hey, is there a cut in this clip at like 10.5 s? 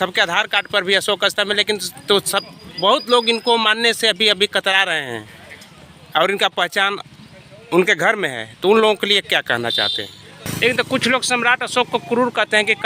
yes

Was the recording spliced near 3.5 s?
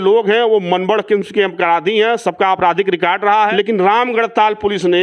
yes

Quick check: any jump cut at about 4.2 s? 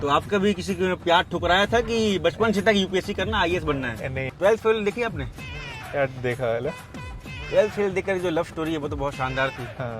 yes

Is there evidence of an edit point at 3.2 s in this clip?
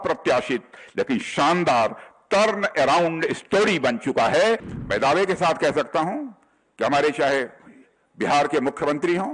no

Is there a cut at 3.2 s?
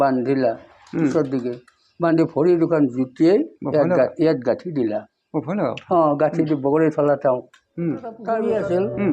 no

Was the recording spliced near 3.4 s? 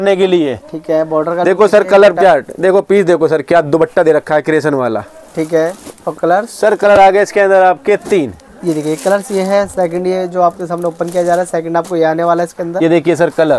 no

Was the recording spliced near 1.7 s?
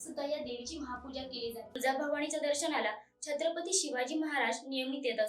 yes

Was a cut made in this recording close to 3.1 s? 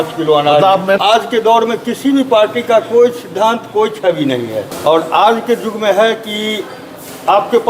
no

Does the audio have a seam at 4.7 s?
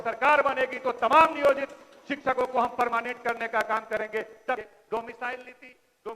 yes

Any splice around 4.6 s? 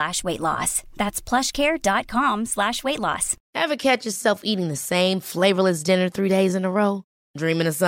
no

